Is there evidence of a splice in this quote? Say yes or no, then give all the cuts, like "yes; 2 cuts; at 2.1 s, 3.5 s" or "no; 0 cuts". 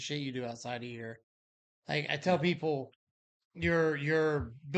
no; 0 cuts